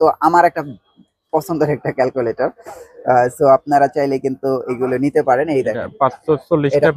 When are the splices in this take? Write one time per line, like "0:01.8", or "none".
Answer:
none